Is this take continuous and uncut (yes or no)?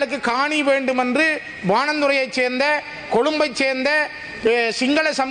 yes